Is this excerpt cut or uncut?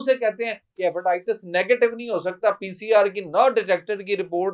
uncut